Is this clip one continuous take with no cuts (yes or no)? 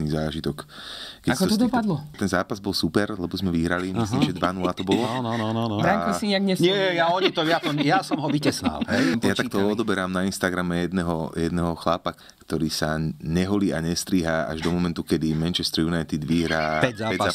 no